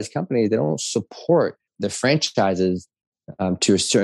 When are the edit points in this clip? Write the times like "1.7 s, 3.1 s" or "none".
1.8 s